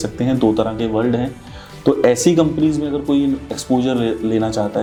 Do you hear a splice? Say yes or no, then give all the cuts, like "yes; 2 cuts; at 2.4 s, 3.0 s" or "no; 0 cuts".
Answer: no; 0 cuts